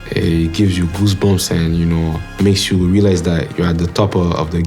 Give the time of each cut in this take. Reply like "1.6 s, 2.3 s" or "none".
2.2 s